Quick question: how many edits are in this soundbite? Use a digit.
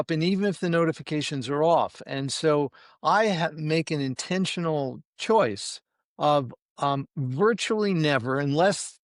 0